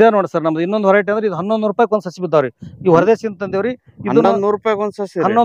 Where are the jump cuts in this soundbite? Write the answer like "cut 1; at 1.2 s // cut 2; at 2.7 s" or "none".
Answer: none